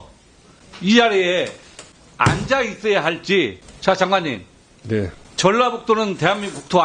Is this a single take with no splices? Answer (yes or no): no